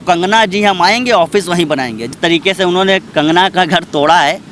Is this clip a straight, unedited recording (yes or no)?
no